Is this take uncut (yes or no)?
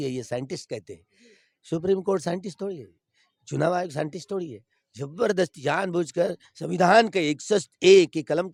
yes